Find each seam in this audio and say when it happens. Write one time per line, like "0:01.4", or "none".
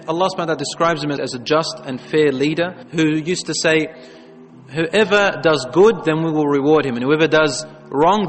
0:01.2